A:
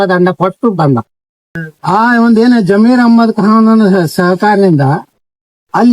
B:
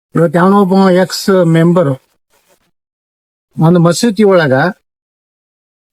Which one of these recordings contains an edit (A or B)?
A